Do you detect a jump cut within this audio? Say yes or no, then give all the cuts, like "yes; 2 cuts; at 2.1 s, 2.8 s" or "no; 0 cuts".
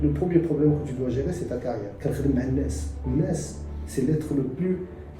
yes; 1 cut; at 1.9 s